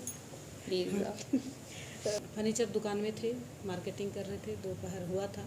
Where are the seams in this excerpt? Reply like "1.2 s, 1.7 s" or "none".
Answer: 2.2 s